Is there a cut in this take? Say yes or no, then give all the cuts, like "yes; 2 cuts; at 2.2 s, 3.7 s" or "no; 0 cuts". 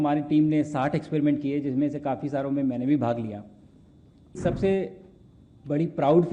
yes; 1 cut; at 4.4 s